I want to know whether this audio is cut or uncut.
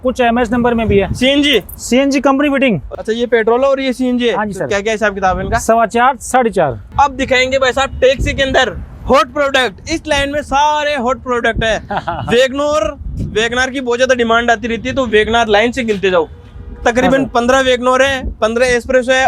cut